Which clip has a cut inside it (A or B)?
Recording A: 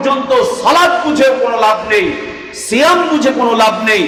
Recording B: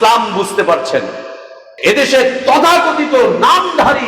B